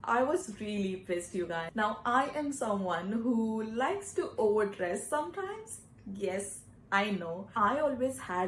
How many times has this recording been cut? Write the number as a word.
two